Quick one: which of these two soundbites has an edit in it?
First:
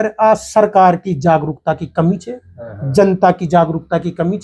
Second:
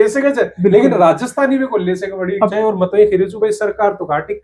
second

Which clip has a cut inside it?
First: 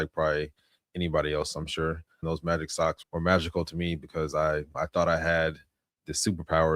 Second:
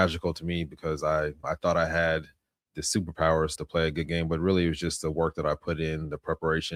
first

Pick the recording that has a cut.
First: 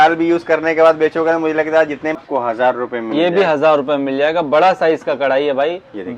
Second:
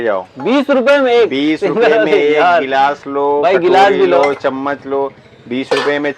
first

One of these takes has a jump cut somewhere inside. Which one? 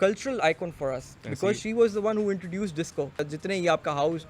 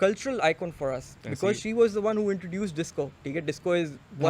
first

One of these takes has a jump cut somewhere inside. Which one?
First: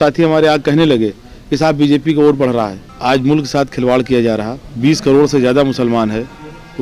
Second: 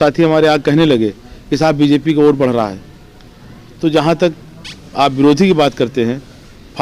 first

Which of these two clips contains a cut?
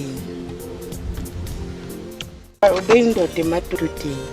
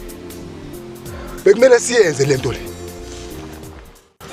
first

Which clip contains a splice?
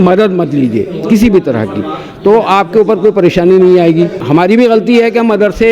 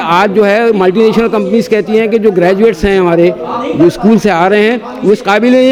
first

